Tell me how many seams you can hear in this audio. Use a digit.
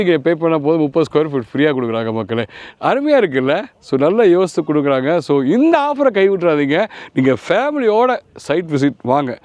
0